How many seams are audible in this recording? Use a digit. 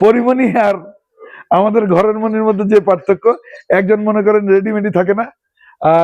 0